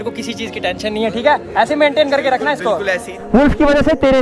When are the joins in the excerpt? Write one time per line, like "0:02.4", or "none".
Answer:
0:03.2